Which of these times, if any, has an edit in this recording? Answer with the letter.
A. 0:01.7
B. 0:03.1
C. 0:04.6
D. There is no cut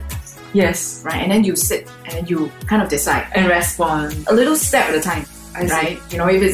C